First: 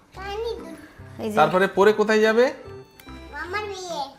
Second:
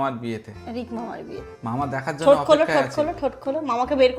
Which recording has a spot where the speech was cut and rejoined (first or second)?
second